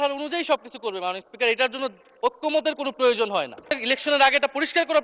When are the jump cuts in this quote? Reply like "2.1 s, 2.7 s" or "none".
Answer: 3.7 s